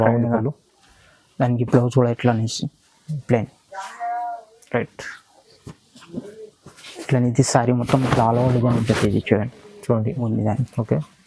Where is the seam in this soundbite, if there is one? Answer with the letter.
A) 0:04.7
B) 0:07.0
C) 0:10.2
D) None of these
C